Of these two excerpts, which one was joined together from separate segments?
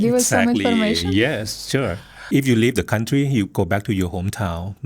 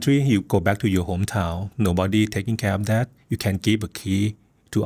first; 1 cut; at 2.1 s

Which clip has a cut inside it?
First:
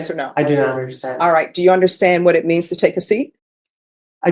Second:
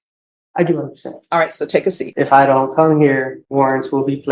second; 2 cuts; at 2.0 s, 3.4 s

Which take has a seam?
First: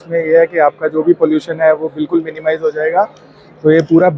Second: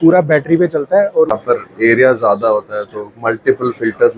second; 1 cut; at 1.3 s

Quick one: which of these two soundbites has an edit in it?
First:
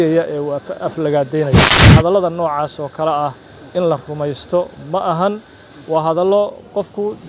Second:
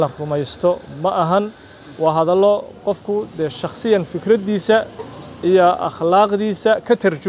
first; 1 cut; at 1.8 s

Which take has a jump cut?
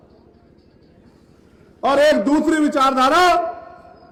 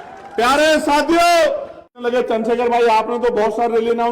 second; 1 cut; at 1.9 s

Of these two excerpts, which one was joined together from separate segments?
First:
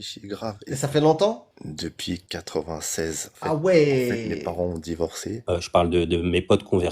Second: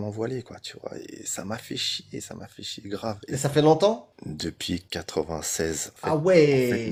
first; 1 cut; at 5.4 s

